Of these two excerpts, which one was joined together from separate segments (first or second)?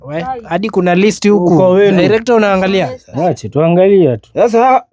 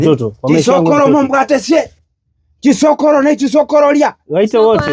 first